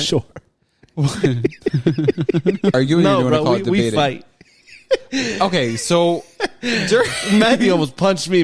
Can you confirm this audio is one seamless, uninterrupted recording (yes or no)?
no